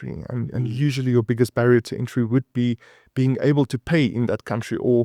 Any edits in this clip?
no; 0 cuts

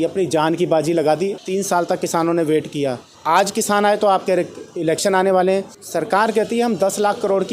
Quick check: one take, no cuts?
no; 3 cuts; at 1.4 s, 3.1 s, 5.8 s

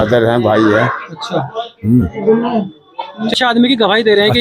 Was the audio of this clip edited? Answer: yes; 1 cut; at 3.3 s

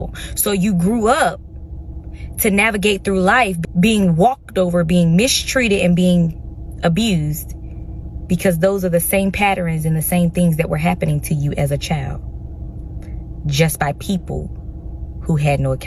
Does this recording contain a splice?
no; 0 cuts

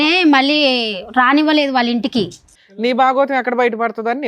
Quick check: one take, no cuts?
no; 1 cut; at 2.5 s

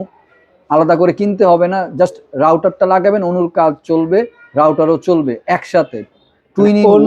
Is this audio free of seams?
yes; 0 cuts

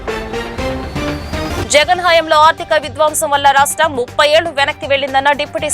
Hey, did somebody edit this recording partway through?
yes; 1 cut; at 1.6 s

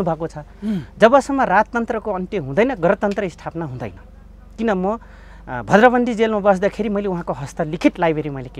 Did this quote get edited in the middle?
no; 0 cuts

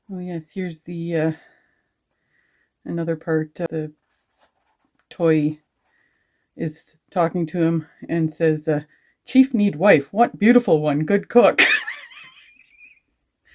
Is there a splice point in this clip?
yes; 1 cut; at 3.6 s

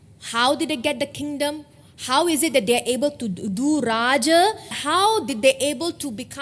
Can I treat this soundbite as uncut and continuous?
no; 1 cut; at 4.8 s

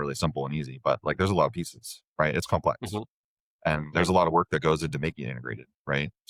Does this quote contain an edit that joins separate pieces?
no; 0 cuts

